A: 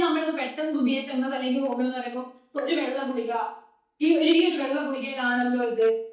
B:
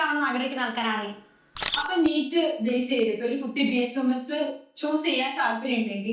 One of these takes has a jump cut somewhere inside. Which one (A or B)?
B